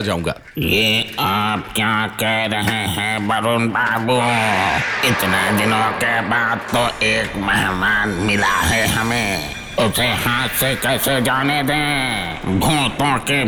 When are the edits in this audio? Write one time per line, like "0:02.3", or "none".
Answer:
none